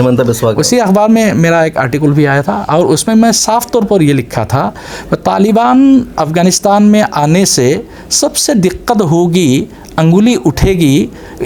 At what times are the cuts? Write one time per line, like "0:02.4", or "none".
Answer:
none